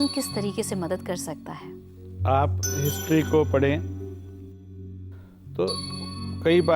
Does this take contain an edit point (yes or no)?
no